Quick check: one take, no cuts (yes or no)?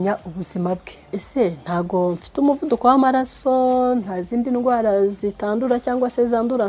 no